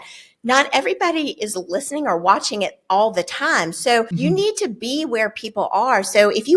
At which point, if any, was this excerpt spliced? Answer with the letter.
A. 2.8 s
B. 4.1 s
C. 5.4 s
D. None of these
B